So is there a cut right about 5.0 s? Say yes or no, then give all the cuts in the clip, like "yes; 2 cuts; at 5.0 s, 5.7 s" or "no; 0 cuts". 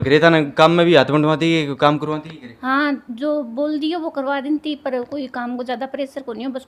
no; 0 cuts